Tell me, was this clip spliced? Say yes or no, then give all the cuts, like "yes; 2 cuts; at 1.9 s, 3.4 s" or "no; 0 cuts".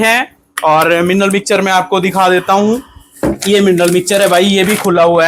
no; 0 cuts